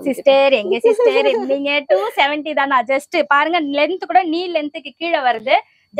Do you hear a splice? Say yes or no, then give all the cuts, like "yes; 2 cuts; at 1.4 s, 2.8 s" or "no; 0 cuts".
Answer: no; 0 cuts